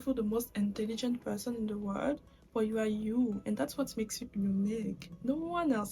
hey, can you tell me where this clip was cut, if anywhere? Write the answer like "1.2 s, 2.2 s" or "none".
none

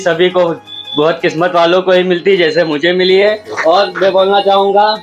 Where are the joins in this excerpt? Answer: none

